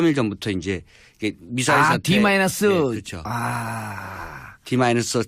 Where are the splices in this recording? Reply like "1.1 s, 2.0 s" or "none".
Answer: 2.3 s